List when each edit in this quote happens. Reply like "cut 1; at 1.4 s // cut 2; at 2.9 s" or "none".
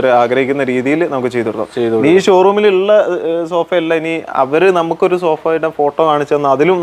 none